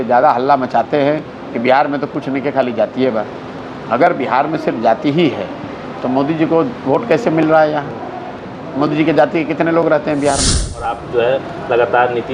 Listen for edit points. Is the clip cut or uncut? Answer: cut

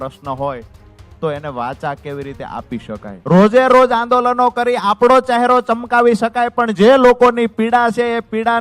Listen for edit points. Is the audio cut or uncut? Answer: cut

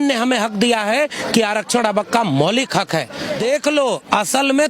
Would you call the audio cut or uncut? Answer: cut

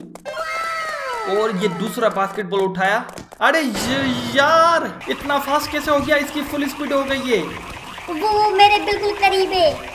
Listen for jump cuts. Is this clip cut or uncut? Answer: cut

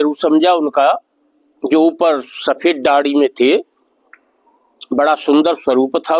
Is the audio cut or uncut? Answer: uncut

